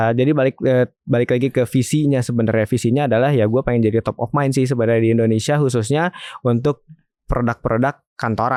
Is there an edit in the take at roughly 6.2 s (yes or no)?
no